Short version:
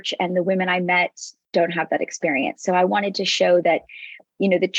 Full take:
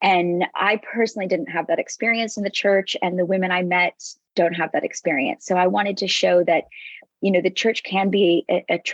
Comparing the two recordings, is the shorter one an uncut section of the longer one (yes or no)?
yes